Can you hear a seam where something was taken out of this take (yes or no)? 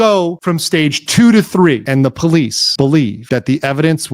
yes